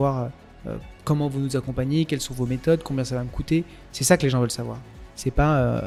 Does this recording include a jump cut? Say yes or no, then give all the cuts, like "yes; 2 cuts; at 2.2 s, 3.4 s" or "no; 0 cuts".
no; 0 cuts